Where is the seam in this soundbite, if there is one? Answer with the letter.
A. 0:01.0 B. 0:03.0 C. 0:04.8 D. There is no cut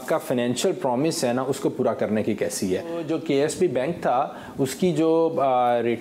B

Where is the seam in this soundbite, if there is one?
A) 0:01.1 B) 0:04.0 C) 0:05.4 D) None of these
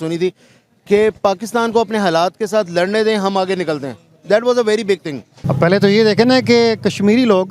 C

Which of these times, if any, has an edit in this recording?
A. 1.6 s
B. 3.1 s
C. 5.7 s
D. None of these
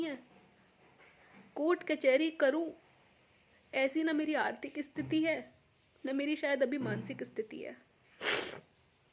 D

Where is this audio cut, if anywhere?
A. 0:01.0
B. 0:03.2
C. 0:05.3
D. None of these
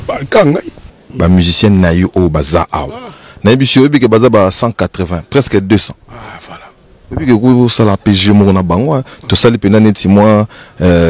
A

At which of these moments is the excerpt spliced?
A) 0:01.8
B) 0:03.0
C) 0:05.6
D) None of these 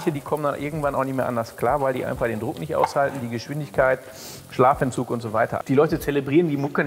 C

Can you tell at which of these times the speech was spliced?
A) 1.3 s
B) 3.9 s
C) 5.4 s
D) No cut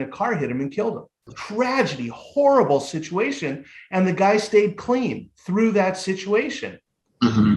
A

